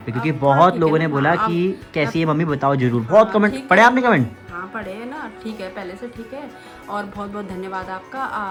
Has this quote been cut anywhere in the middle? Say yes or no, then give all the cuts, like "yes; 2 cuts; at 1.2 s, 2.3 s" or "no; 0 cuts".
no; 0 cuts